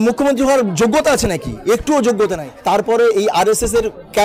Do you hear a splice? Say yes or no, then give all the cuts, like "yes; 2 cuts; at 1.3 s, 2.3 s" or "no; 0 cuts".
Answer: yes; 1 cut; at 2.5 s